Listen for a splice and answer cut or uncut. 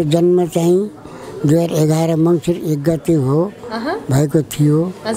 uncut